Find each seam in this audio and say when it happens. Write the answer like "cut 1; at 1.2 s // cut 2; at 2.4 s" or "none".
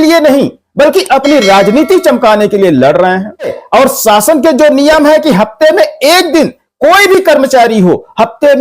cut 1; at 3.6 s